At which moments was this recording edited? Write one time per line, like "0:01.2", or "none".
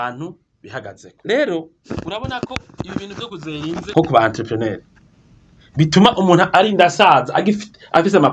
0:01.0
0:01.8
0:03.9